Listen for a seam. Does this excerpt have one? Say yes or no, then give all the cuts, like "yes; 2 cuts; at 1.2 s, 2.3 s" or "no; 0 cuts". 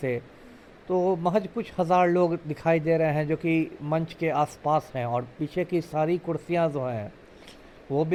no; 0 cuts